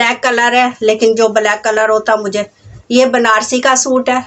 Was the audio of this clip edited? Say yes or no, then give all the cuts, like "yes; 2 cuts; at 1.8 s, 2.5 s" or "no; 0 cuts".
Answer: no; 0 cuts